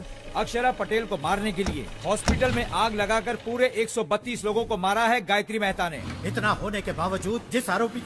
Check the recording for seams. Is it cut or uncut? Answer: cut